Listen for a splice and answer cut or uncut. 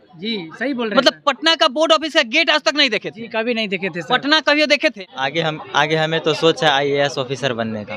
cut